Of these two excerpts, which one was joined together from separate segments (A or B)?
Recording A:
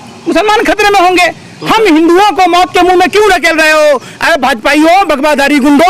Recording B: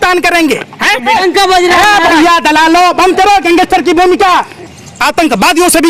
B